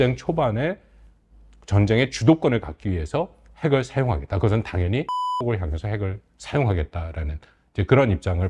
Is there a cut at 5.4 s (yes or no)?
yes